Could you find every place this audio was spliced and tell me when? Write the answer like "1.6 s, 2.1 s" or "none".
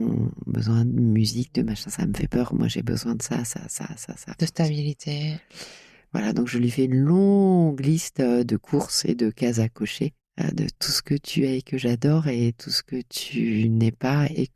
none